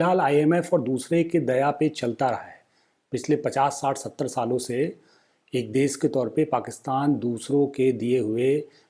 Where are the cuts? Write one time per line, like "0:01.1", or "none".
none